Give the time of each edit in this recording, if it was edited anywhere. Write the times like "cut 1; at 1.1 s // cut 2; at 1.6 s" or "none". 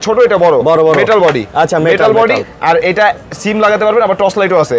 cut 1; at 2.5 s